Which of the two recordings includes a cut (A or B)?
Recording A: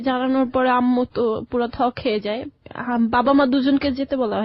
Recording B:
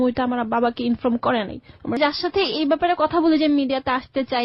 B